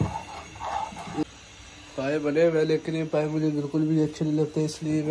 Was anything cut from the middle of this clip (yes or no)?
yes